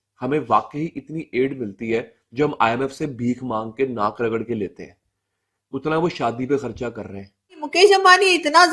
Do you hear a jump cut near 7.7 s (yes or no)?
yes